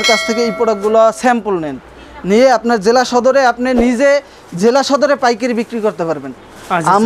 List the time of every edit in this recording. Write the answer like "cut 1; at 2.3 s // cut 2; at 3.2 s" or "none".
none